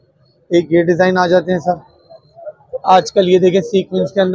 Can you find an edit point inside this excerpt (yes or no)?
no